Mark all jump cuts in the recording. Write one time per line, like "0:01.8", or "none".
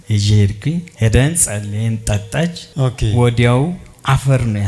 none